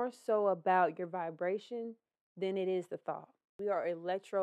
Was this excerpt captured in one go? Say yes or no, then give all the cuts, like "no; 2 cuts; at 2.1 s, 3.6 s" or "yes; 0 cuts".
no; 1 cut; at 3.5 s